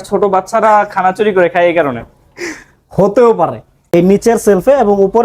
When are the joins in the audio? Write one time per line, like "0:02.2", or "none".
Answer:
0:03.7